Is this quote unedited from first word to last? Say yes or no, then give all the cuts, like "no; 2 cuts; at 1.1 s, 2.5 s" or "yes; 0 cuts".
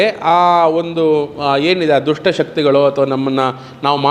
yes; 0 cuts